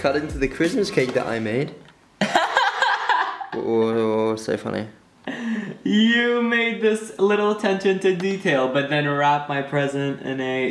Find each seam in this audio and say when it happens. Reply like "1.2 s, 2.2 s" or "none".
none